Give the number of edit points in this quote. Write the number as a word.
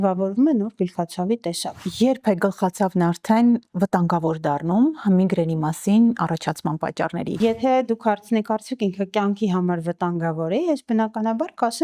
two